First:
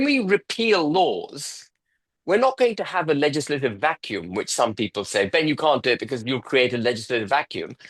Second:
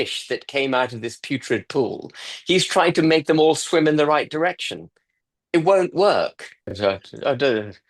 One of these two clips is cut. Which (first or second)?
second